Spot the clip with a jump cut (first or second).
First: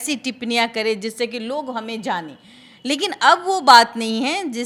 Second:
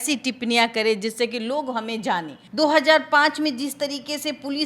second